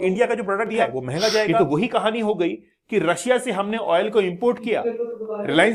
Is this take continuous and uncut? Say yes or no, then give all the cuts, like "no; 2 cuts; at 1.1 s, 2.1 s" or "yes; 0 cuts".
no; 1 cut; at 1.6 s